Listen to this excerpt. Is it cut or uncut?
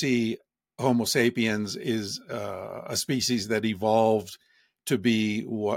uncut